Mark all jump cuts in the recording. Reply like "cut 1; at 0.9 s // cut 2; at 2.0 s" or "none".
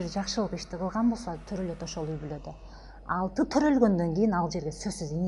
none